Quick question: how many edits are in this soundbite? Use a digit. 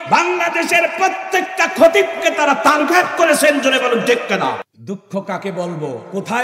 1